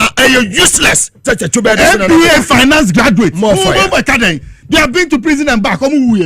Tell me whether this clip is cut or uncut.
cut